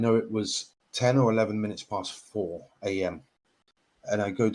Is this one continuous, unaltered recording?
no; 1 cut; at 3.6 s

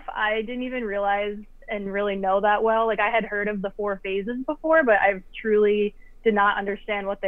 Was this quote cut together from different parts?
no; 0 cuts

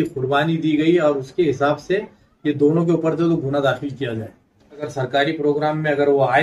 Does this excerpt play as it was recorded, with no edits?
no; 1 cut; at 4.9 s

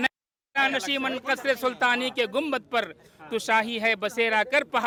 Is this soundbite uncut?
yes; 0 cuts

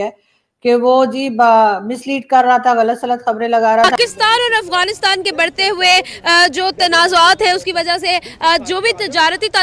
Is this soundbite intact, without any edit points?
no; 1 cut; at 3.9 s

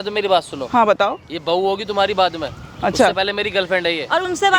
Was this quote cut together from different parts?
no; 0 cuts

